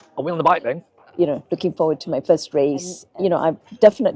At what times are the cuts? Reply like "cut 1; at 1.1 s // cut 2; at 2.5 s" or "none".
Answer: cut 1; at 1.0 s // cut 2; at 3.0 s